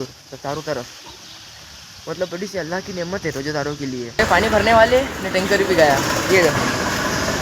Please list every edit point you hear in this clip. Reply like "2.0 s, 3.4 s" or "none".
4.2 s